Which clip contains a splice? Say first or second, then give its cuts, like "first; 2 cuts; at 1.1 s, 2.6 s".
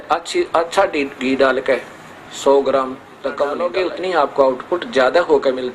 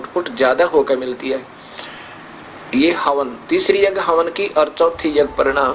first; 1 cut; at 3.6 s